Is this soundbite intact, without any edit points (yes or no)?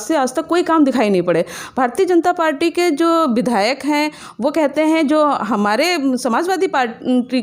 yes